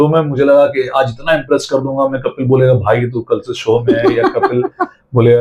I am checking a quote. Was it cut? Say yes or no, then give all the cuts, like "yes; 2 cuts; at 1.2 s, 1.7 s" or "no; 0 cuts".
no; 0 cuts